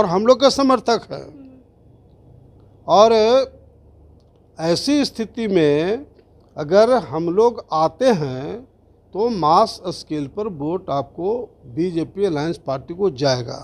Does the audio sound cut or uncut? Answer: uncut